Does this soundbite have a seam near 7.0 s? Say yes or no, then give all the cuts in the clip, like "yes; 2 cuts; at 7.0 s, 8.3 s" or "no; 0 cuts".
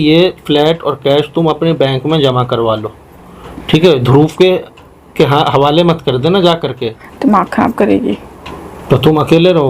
yes; 1 cut; at 7.0 s